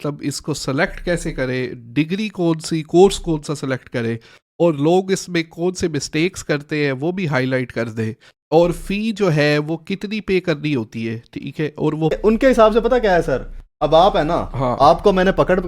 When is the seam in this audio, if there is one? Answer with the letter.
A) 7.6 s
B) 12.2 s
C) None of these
B